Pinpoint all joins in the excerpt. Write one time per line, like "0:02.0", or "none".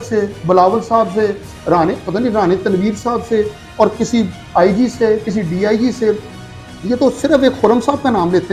none